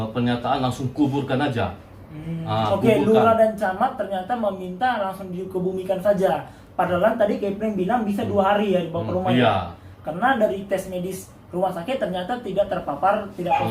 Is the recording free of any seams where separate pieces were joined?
yes; 0 cuts

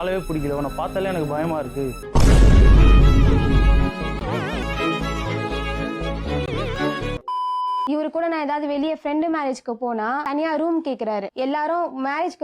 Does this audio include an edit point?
yes; 1 cut; at 7.3 s

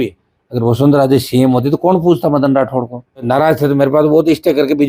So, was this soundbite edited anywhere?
yes; 1 cut; at 3.3 s

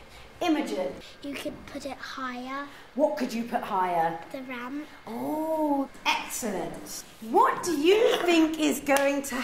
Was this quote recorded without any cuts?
no; 1 cut; at 2.8 s

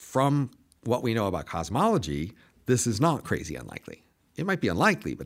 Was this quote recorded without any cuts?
yes; 0 cuts

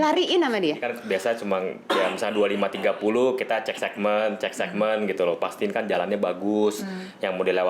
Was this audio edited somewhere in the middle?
yes; 1 cut; at 0.9 s

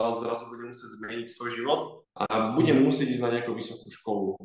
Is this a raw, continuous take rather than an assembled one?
yes; 0 cuts

